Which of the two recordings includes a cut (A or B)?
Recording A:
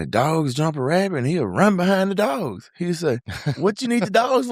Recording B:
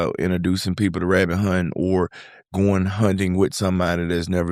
A